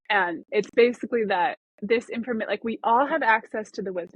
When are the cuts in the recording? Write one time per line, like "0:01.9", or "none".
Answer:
0:01.7